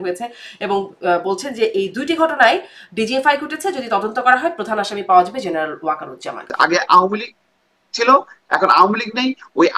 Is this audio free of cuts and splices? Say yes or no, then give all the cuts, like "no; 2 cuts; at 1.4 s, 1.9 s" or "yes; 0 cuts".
no; 1 cut; at 6.5 s